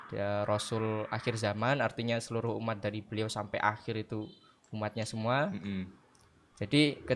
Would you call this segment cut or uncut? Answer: uncut